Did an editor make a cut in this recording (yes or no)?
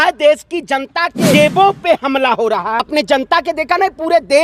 yes